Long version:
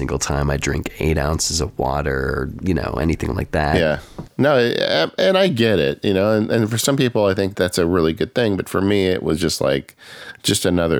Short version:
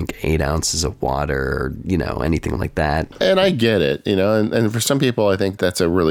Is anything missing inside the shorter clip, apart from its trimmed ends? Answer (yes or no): yes